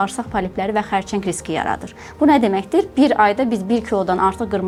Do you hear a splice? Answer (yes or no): no